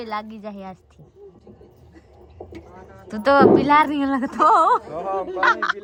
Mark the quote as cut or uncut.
uncut